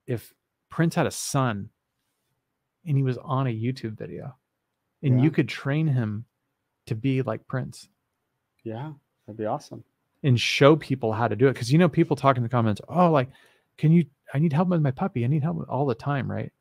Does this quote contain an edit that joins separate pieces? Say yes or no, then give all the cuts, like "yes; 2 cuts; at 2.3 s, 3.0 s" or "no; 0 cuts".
no; 0 cuts